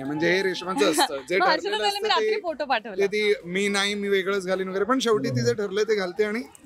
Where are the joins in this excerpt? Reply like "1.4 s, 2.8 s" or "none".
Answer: none